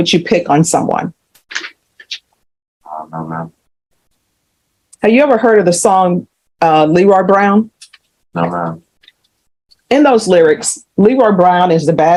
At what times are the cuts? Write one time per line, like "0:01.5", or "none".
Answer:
none

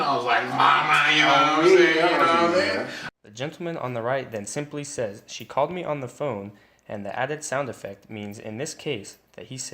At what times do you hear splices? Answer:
none

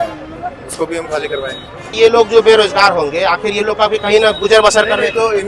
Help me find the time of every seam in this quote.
0:02.0

